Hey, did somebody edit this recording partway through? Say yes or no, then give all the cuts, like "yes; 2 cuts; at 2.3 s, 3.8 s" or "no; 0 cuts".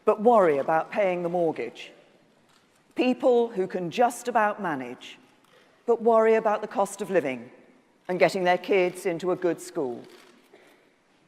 yes; 1 cut; at 2.0 s